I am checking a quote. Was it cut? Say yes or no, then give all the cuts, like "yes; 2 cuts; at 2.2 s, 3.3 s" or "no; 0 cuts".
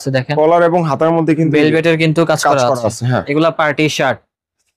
no; 0 cuts